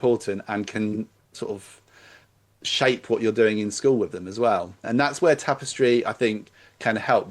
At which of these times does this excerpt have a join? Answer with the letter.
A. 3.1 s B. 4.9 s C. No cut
B